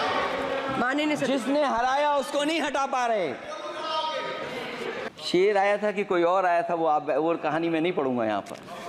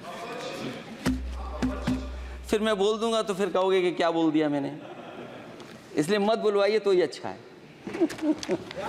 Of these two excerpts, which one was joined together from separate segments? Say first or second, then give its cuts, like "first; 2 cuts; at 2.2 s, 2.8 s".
first; 1 cut; at 5.1 s